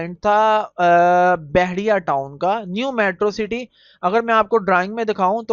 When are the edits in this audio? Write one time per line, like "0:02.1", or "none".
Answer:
none